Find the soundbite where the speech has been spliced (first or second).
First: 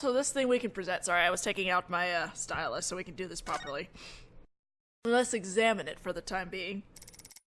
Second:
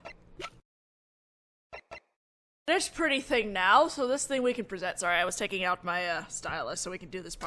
second